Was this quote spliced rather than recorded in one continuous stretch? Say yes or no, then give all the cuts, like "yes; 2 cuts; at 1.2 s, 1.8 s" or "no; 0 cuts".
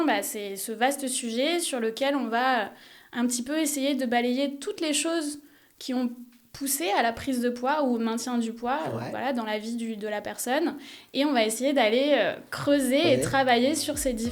no; 0 cuts